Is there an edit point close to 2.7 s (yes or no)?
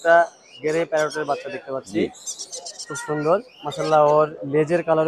no